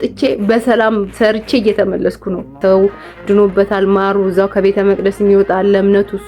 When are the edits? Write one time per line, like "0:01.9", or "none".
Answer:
0:02.5